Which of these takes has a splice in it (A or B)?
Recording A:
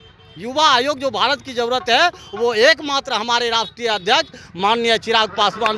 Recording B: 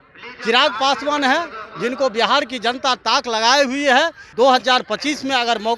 B